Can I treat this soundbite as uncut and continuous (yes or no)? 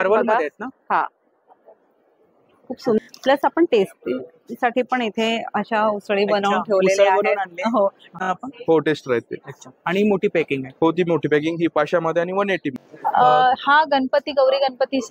no